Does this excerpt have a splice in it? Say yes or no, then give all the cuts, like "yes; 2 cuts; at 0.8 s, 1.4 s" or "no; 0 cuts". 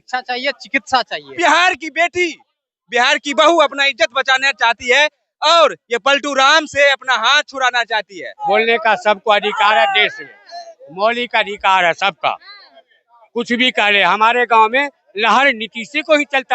yes; 2 cuts; at 1.3 s, 8.4 s